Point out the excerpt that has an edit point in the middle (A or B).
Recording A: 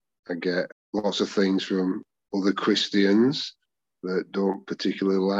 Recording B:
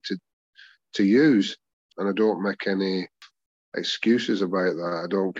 B